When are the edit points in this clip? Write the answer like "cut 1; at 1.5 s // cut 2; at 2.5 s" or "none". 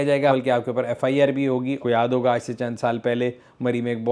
cut 1; at 1.8 s

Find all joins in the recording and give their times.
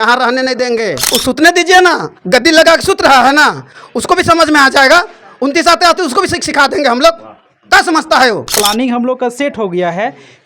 cut 1; at 1.0 s // cut 2; at 8.5 s

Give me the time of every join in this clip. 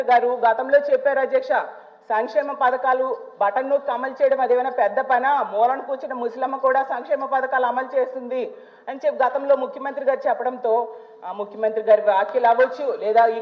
none

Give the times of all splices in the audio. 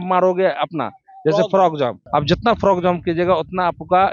cut 1; at 2.0 s

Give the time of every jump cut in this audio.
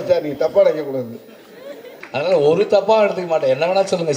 cut 1; at 1.9 s

